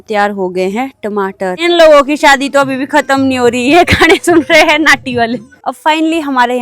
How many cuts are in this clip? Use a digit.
2